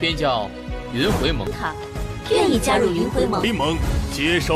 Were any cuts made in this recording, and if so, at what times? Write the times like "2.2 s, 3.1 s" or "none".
none

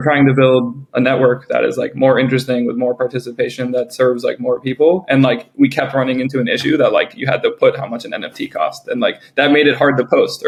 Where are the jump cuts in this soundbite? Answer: none

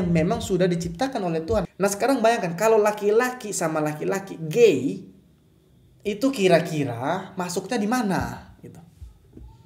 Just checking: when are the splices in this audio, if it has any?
1.6 s

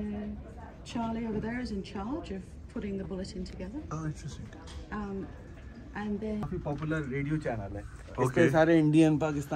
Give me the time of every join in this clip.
6.4 s

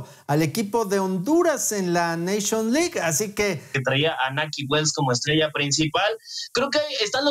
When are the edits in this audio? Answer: 3.7 s

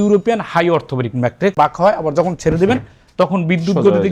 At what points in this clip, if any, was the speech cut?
1.5 s

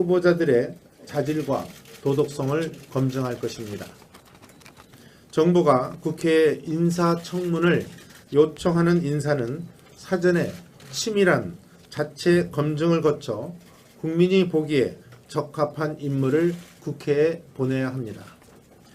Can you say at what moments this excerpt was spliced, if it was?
11.4 s

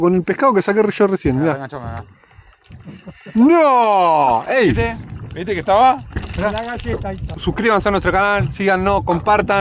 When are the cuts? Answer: 7.3 s

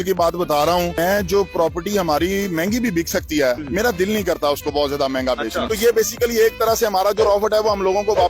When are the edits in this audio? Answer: 0.9 s, 5.7 s

